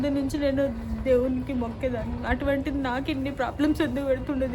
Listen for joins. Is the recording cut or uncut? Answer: uncut